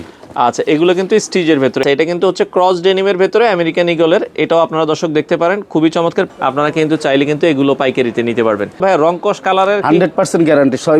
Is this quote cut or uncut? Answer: cut